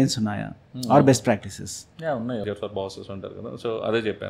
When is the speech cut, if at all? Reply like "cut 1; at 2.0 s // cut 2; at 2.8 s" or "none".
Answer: cut 1; at 2.4 s